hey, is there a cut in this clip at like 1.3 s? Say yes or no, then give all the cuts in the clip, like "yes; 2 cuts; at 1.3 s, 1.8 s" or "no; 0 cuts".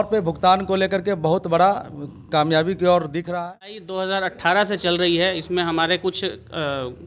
no; 1 cut; at 3.9 s